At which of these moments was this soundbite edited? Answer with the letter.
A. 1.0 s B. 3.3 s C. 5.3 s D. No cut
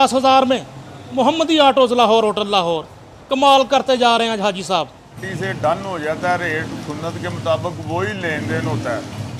C